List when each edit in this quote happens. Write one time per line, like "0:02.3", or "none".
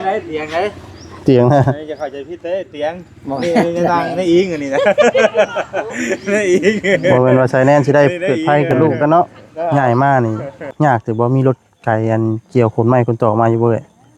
0:09.7